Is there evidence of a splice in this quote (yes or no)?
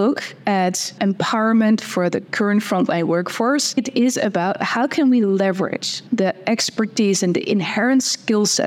yes